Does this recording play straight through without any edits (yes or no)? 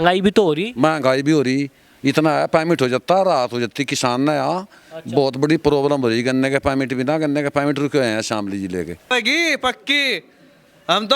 no